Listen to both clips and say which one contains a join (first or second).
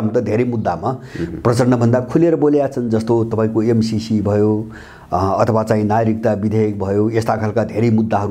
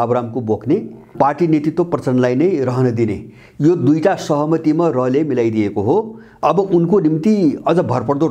second